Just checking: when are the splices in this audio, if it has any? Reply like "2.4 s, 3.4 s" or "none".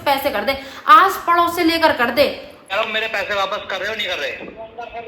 2.6 s